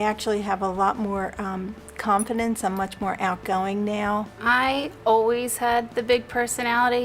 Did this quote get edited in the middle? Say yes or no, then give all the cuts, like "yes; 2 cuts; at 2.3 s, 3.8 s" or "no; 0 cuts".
no; 0 cuts